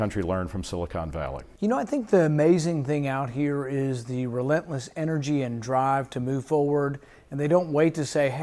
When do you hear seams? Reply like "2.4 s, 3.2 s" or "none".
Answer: 4.2 s